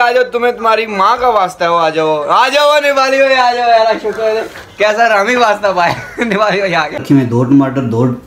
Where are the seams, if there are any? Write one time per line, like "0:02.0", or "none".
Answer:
0:07.0